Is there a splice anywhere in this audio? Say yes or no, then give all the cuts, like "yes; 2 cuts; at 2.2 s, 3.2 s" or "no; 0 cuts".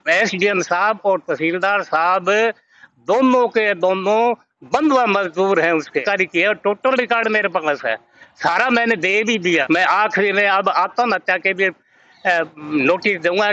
yes; 2 cuts; at 6.0 s, 9.6 s